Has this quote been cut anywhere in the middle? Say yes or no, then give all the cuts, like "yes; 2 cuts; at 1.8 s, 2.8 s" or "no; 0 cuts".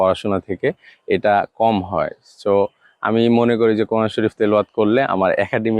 no; 0 cuts